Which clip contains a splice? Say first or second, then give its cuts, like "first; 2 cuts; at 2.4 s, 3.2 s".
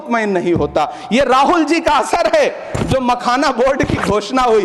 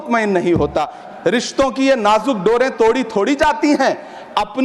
second; 1 cut; at 1.0 s